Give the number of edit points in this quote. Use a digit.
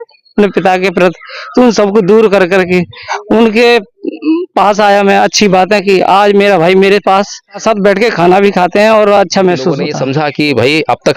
2